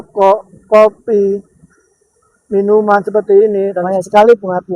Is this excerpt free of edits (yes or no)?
no